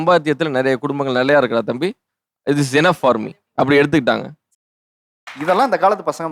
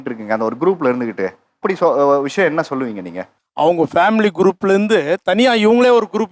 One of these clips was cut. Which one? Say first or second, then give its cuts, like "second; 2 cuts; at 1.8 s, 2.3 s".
first; 1 cut; at 4.6 s